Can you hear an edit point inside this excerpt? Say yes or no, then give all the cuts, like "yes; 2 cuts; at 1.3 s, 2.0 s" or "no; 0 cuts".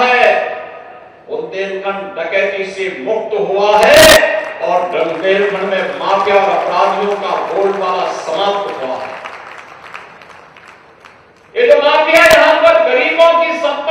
no; 0 cuts